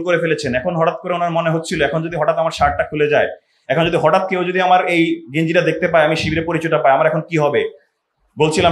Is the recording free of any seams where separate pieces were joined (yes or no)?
yes